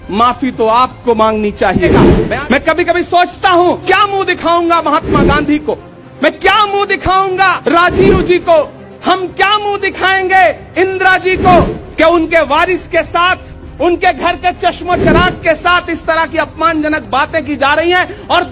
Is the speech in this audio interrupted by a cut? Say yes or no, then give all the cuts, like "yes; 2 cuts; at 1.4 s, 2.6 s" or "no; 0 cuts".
yes; 4 cuts; at 1.9 s, 3.8 s, 7.6 s, 11.8 s